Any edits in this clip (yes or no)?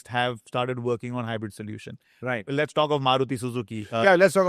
no